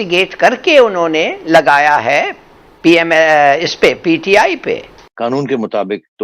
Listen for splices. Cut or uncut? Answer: cut